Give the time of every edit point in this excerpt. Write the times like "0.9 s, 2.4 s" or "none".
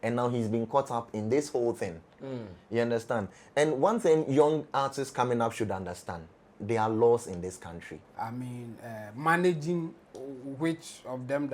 8.1 s